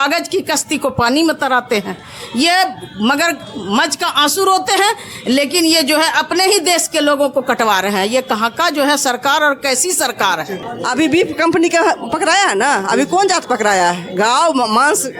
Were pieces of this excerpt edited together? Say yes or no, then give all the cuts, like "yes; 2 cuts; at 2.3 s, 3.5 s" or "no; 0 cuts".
yes; 1 cut; at 10.6 s